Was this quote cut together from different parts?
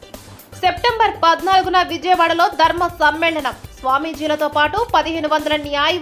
no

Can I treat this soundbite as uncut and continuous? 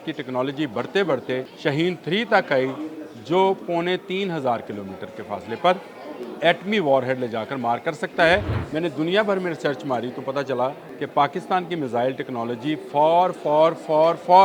no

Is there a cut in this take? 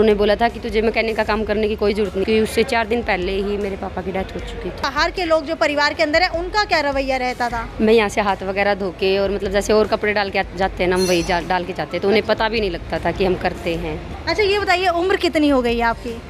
yes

